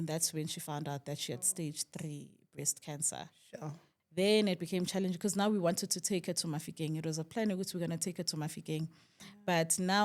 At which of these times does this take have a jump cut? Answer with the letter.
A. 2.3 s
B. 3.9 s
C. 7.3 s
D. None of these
B